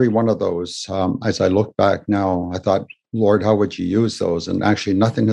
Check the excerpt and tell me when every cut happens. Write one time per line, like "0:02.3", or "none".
none